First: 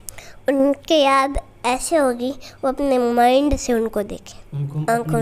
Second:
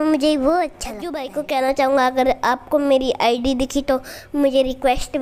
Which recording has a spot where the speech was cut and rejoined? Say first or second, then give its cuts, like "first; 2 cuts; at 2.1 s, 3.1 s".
second; 1 cut; at 1.1 s